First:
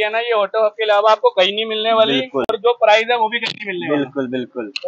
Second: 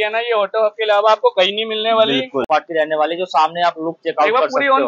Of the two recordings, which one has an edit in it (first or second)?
second